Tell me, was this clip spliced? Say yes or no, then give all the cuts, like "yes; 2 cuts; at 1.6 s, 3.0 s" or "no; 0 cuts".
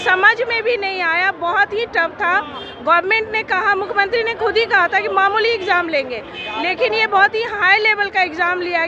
no; 0 cuts